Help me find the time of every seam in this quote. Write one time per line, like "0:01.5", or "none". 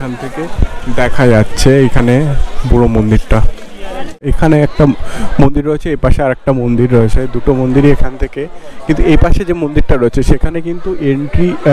0:04.3